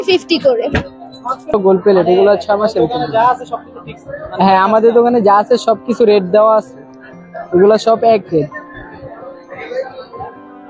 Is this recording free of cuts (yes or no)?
no